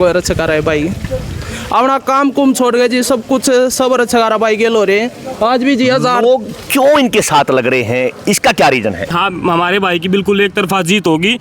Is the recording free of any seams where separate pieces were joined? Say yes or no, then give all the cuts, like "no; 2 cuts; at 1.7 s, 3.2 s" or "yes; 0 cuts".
no; 1 cut; at 9.2 s